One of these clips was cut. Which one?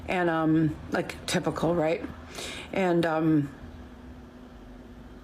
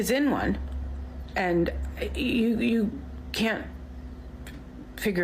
first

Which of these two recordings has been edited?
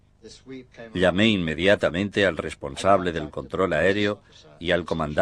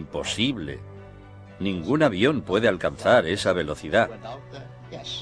first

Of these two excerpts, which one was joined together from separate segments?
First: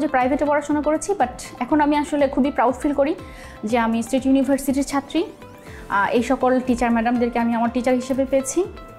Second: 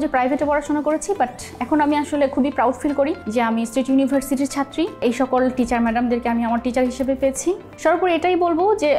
second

